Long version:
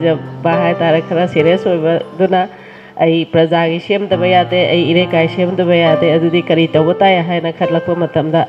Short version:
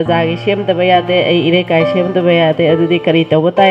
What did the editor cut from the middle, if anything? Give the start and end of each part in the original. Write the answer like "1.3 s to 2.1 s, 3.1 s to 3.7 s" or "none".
none